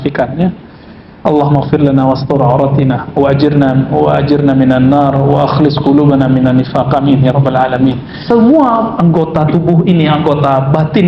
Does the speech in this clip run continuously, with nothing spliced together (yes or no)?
no